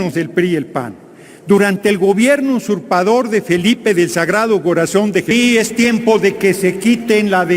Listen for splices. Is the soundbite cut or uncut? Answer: cut